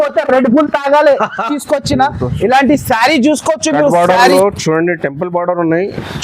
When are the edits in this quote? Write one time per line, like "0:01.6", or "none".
0:01.5